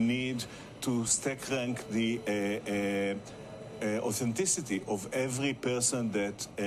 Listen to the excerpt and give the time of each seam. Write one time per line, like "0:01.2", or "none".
none